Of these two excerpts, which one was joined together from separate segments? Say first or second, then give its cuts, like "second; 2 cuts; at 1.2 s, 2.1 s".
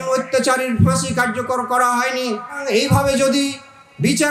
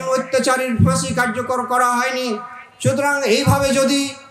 first; 1 cut; at 2.6 s